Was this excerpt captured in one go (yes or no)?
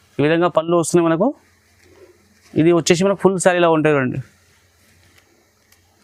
yes